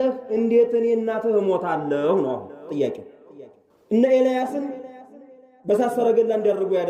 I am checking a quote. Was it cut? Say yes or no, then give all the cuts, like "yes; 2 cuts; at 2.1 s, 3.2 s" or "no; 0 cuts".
no; 0 cuts